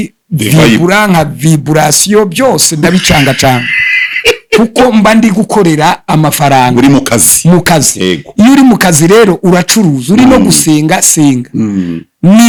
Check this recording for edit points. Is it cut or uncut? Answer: uncut